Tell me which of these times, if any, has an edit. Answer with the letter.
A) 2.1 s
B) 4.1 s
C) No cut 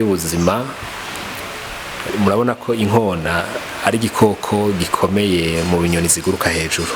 A